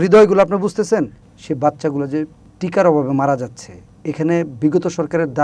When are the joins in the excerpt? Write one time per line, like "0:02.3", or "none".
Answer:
0:01.2

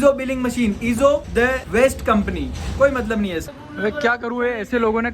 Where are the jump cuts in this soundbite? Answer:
0:03.6

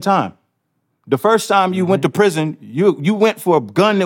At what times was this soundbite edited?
none

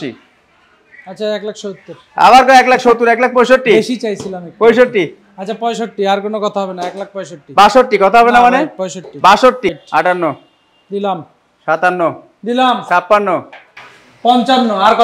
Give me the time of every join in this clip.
0:09.7

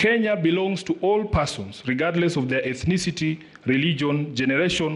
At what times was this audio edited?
none

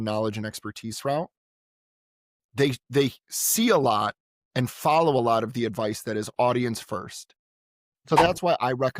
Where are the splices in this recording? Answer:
0:08.1

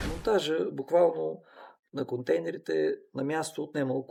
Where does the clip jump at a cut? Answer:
none

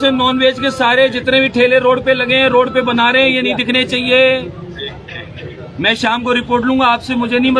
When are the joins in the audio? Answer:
none

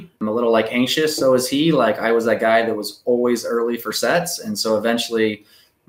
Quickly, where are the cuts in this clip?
none

